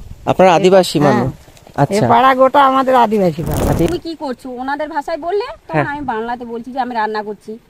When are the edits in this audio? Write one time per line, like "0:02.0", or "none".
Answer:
0:03.9